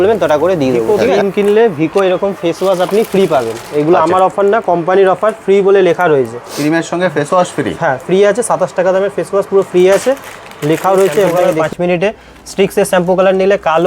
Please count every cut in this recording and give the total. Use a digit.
2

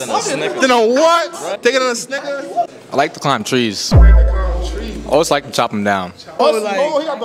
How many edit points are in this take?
3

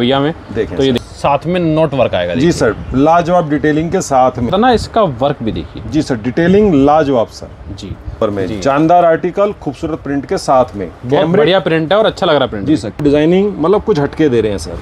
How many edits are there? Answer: 4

